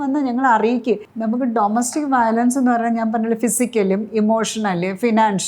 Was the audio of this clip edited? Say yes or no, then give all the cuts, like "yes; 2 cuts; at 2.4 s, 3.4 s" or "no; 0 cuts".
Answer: yes; 1 cut; at 1.1 s